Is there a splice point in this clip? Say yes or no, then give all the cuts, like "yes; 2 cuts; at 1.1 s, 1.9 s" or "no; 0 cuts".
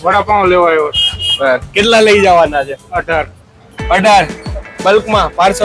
no; 0 cuts